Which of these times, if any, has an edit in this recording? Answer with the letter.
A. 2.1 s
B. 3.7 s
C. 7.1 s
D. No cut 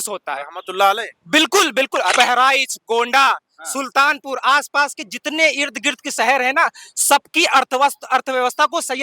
A